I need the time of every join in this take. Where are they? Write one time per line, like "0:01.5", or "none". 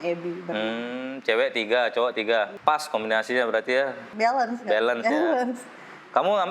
0:02.5
0:04.0

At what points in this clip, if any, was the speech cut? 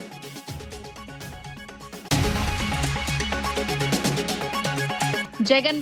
0:02.1
0:03.4
0:04.8

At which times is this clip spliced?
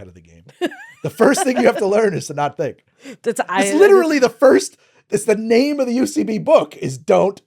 none

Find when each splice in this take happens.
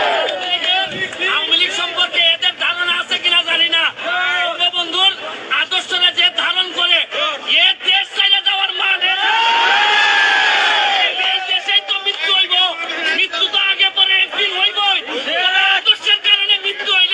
none

